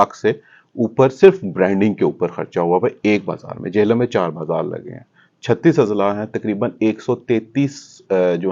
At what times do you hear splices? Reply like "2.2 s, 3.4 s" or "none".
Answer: none